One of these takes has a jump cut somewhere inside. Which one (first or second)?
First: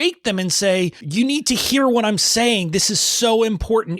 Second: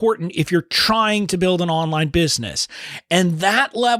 first